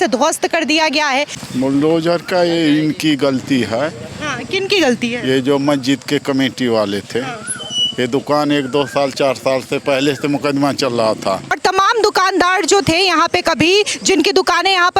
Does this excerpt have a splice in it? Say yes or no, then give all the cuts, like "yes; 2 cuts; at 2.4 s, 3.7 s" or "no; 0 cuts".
yes; 2 cuts; at 1.4 s, 11.6 s